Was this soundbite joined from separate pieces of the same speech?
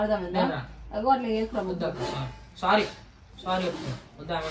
no; 0 cuts

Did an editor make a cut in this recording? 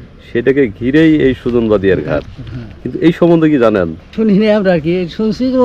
yes; 1 cut; at 4.1 s

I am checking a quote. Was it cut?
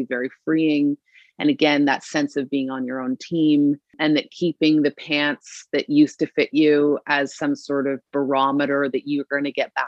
yes; 1 cut; at 4.0 s

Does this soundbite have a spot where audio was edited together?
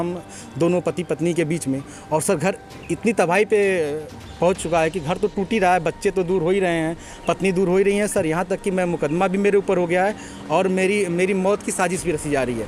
no; 0 cuts

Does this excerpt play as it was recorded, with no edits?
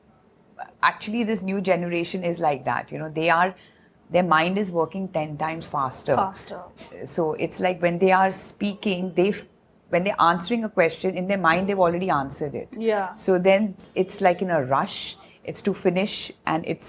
yes; 0 cuts

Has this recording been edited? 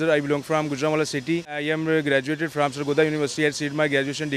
yes; 1 cut; at 1.6 s

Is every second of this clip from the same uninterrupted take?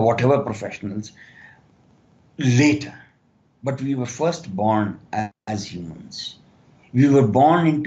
yes; 0 cuts

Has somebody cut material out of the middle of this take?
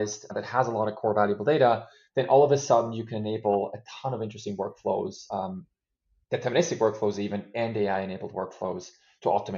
no; 0 cuts

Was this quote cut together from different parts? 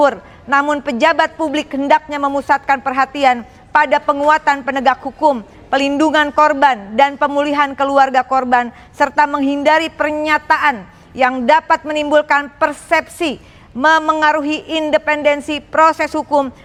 no; 0 cuts

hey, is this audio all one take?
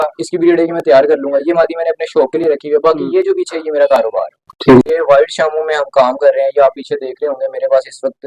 no; 1 cut; at 4.9 s

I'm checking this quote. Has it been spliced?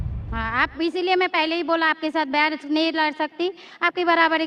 no; 0 cuts

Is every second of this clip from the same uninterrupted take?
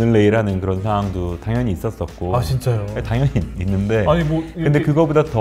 yes; 0 cuts

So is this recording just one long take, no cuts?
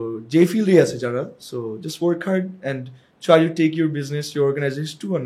yes; 0 cuts

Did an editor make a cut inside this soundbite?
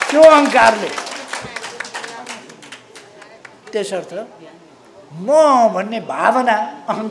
no; 0 cuts

